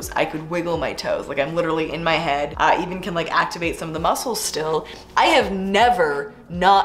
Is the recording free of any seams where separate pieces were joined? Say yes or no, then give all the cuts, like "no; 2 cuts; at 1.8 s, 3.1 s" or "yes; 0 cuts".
yes; 0 cuts